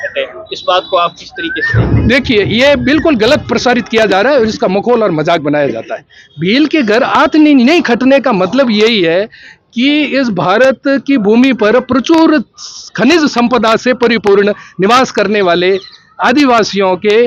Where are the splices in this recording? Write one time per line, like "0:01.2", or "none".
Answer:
none

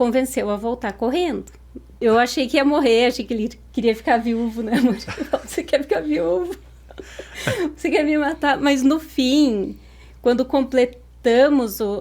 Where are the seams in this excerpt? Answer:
0:02.0

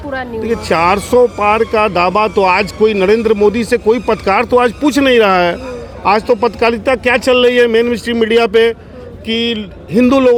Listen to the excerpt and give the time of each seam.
none

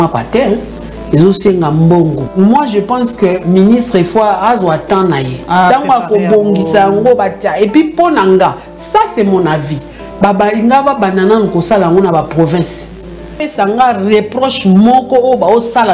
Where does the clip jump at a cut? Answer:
0:02.2
0:13.4

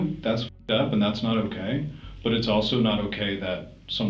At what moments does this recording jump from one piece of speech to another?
none

